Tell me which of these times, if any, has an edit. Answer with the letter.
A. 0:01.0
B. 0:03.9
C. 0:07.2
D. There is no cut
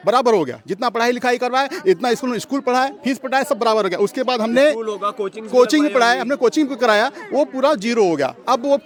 D